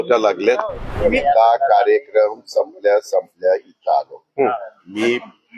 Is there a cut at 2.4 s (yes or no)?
no